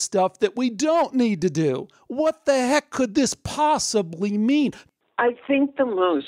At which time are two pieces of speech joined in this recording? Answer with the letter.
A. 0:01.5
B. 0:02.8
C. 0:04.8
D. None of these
C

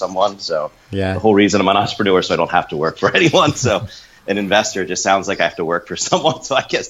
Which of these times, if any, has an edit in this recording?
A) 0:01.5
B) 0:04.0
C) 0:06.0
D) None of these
D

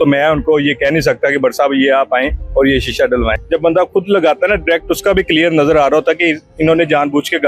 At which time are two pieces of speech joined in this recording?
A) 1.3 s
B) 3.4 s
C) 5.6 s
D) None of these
B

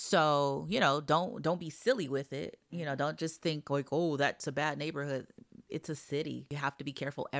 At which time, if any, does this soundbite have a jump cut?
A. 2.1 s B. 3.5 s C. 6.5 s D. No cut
C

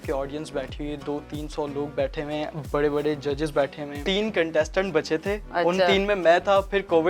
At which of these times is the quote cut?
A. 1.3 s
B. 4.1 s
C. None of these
B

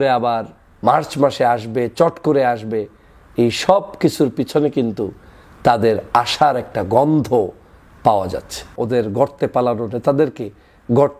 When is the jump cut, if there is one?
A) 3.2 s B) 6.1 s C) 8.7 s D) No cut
C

